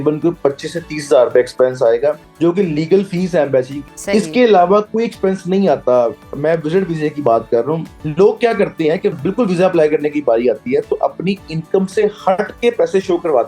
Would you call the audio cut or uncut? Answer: cut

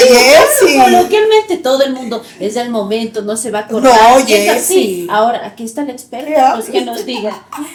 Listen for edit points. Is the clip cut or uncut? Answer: uncut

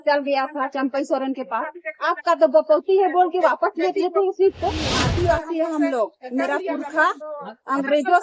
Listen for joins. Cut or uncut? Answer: cut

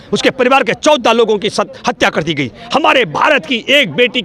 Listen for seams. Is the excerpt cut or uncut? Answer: uncut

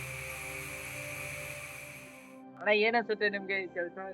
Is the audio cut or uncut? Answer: cut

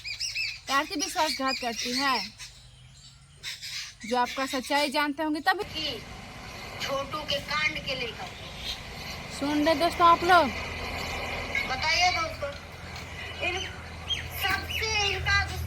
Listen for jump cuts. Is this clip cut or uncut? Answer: cut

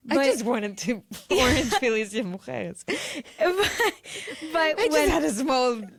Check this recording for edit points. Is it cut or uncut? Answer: uncut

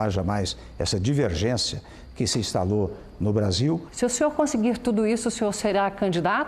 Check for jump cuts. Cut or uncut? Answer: cut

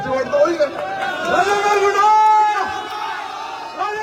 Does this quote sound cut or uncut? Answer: uncut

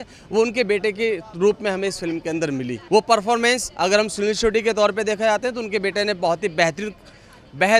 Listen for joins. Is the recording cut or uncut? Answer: uncut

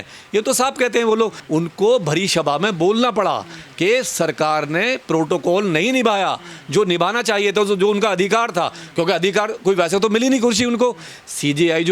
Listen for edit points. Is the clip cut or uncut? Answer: cut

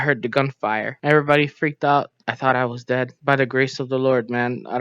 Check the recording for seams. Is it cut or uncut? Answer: cut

